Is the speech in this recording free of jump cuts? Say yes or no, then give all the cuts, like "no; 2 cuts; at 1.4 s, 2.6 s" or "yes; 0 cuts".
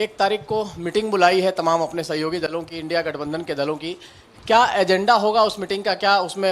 yes; 0 cuts